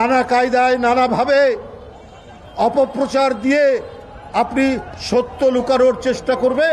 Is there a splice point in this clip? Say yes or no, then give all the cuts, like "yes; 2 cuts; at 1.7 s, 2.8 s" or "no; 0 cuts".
no; 0 cuts